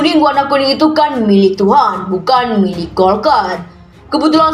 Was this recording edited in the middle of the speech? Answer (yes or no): no